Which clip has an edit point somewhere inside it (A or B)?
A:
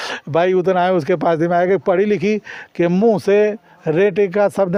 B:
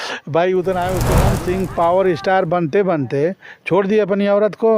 B